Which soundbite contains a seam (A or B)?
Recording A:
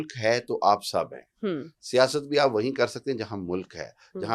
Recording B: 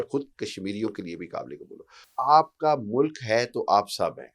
B